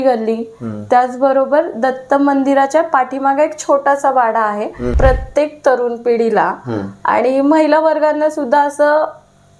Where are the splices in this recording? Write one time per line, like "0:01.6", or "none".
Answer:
0:04.9